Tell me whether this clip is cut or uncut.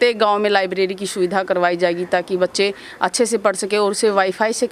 uncut